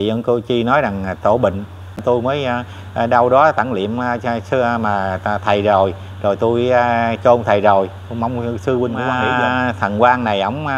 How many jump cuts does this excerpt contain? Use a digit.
2